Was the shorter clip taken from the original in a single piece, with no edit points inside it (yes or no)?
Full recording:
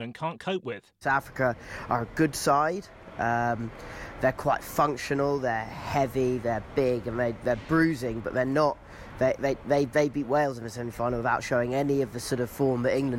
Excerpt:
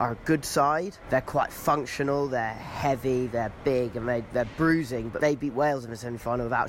no